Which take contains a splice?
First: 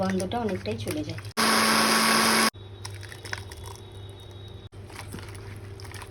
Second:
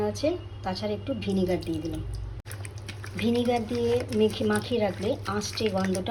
first; 1 cut; at 2.7 s

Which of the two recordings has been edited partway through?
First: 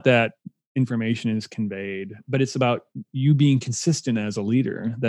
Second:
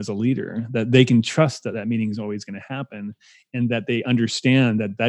first; 1 cut; at 2.2 s

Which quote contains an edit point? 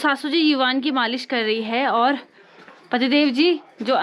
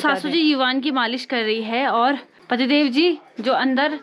second; 1 cut; at 2.3 s

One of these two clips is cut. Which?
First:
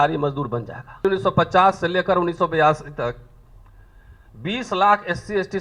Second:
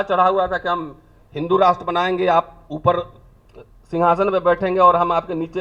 first; 1 cut; at 1.0 s

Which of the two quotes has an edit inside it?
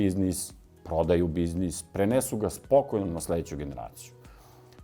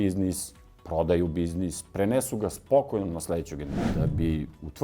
second; 1 cut; at 3.9 s

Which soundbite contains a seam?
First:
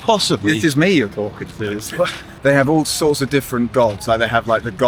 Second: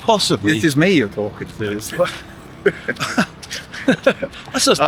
first; 1 cut; at 2.2 s

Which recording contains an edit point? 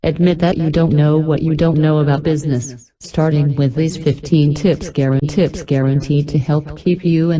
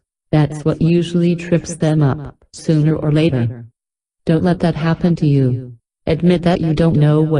first; 1 cut; at 5.6 s

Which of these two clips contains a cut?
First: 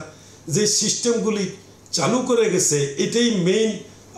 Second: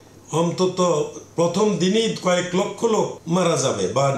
second; 1 cut; at 3.2 s

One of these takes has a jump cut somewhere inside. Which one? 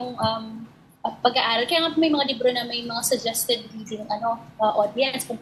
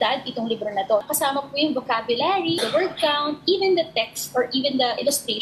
second; 2 cuts; at 1.0 s, 2.6 s

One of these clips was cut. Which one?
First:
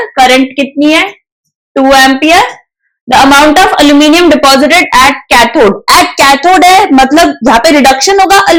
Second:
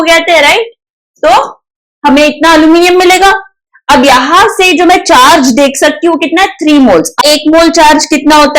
second; 1 cut; at 7.2 s

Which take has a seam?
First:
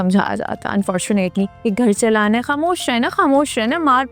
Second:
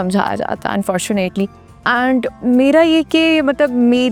first; 1 cut; at 1.6 s

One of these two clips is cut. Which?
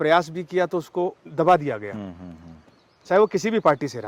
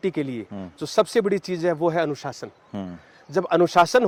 first; 1 cut; at 1.2 s

